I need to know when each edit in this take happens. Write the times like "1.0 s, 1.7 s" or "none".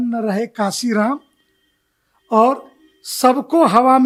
none